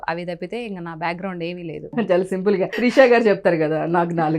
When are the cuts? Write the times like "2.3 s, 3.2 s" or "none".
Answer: 1.9 s, 2.7 s